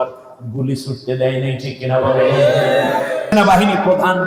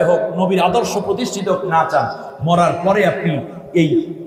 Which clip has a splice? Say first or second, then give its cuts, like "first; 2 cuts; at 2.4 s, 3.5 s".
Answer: first; 1 cut; at 3.3 s